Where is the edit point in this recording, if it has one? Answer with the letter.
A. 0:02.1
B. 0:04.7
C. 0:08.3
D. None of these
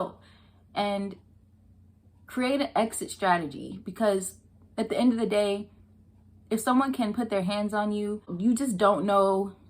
C